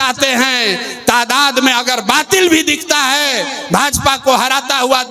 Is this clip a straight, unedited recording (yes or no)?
yes